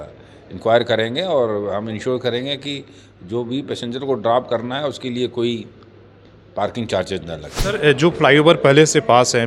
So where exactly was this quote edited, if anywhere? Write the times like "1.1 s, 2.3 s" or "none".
7.5 s

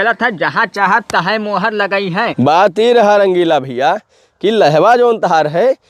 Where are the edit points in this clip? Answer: 2.3 s

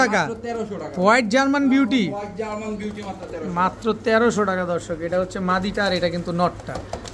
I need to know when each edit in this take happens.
none

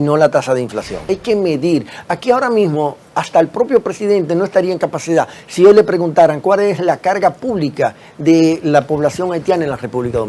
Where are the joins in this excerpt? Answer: 1.1 s

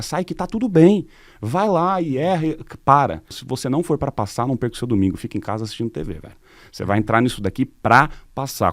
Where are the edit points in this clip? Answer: 3.4 s

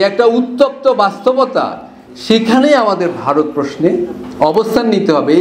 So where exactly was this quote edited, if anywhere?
none

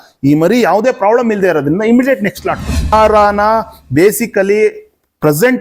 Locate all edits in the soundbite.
2.9 s

